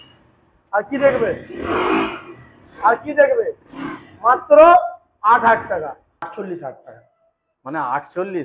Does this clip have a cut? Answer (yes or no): yes